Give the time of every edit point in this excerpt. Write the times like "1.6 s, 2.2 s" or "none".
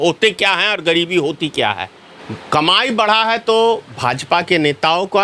1.9 s